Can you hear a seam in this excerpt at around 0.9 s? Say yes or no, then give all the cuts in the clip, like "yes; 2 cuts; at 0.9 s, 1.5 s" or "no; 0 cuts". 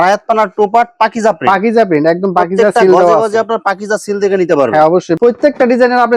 no; 1 cut; at 5.1 s